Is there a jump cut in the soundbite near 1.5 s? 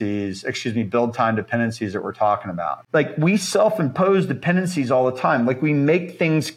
no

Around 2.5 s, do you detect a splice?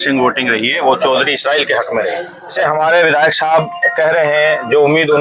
yes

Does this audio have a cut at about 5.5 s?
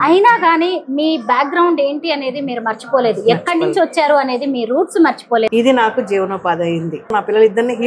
yes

